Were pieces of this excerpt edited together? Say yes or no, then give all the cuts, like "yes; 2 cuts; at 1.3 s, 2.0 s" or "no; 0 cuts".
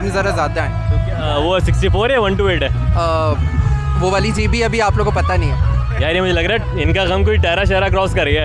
no; 0 cuts